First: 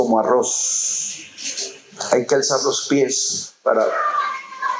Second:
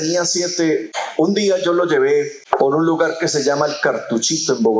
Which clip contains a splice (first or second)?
second